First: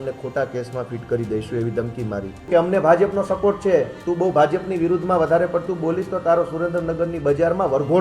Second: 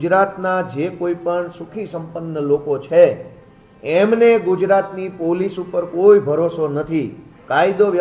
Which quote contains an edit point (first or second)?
first